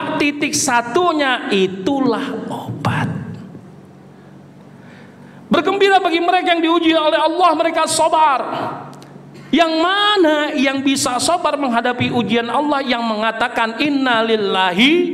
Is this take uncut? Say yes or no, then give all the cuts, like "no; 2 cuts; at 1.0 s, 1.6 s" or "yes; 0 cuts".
no; 1 cut; at 4.6 s